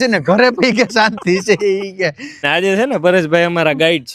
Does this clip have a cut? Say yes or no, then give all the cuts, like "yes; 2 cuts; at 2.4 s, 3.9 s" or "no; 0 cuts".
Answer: yes; 1 cut; at 2.4 s